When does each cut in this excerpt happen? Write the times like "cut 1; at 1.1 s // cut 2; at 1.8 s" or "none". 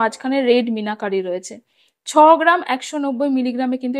none